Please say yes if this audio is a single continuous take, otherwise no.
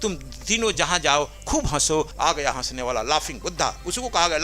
no